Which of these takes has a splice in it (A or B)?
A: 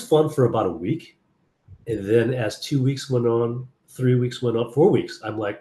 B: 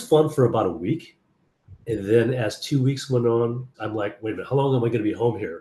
B